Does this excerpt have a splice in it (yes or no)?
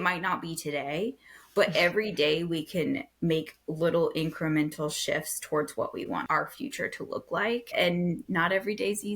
yes